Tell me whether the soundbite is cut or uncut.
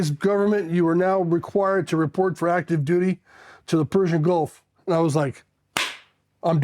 cut